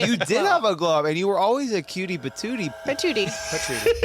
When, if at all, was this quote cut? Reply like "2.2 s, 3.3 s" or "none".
2.7 s